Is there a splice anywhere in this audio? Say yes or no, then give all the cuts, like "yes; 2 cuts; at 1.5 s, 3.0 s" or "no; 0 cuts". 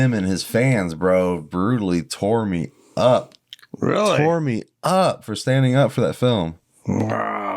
no; 0 cuts